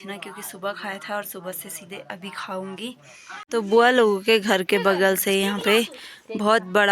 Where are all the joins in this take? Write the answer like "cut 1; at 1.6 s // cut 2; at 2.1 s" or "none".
cut 1; at 3.4 s